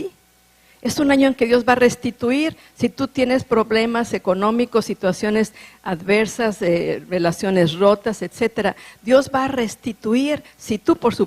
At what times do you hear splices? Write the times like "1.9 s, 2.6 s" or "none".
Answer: 10.1 s